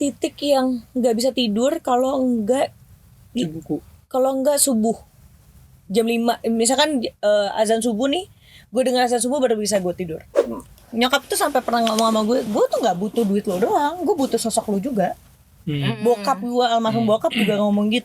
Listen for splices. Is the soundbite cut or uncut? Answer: cut